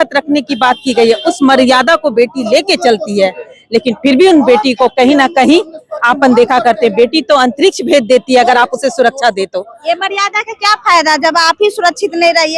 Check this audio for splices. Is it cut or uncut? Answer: uncut